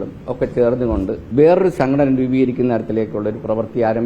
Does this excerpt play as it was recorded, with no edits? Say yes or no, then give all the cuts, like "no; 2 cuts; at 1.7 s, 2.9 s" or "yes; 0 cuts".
no; 1 cut; at 1.2 s